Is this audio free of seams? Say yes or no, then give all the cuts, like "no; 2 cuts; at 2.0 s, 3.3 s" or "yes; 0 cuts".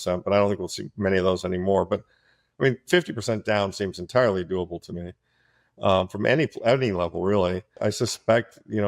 no; 1 cut; at 7.8 s